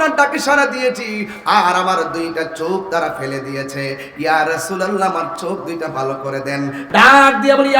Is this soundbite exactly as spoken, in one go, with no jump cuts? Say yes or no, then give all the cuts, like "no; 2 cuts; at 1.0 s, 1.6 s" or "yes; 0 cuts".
no; 1 cut; at 6.8 s